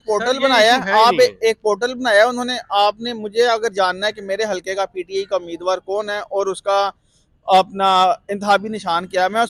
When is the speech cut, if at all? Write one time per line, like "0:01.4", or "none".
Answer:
none